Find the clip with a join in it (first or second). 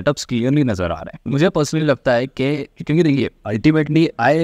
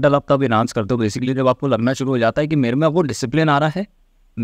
first